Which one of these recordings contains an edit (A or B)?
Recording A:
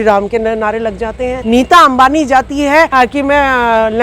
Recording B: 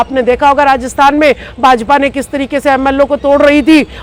A